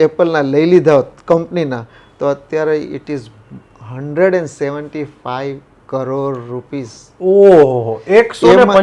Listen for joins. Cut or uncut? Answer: uncut